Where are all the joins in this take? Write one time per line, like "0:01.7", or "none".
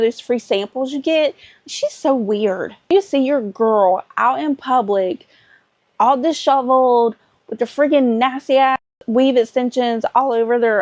0:02.9